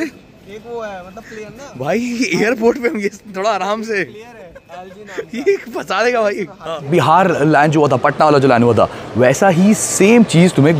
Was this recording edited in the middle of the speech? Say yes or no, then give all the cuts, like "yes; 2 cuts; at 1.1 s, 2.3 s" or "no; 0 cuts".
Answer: yes; 1 cut; at 6.9 s